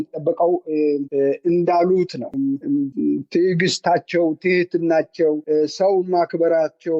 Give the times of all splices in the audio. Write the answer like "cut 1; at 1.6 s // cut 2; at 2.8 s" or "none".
cut 1; at 2.3 s